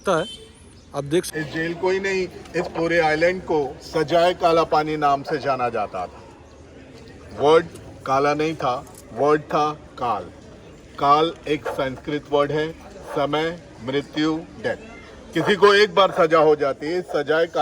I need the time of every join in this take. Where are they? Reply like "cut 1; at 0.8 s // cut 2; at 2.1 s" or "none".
cut 1; at 1.3 s